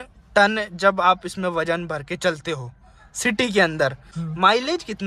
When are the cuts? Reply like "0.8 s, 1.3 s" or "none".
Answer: 4.1 s